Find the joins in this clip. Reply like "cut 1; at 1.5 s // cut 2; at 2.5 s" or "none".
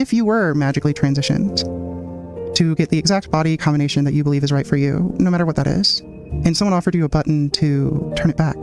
none